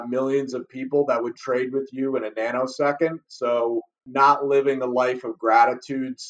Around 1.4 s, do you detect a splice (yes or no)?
no